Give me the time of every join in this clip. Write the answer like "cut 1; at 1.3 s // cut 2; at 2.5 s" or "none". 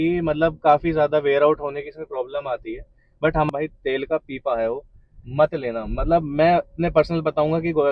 cut 1; at 3.5 s